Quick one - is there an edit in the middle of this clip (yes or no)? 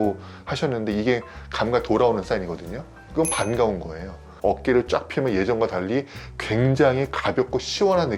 yes